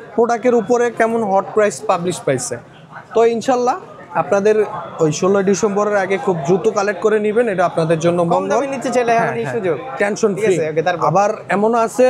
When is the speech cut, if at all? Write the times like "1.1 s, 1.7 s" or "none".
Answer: none